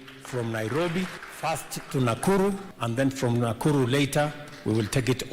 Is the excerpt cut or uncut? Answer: cut